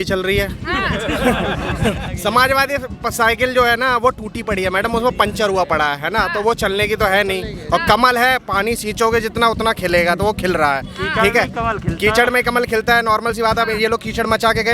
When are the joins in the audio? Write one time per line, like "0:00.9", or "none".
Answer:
0:02.1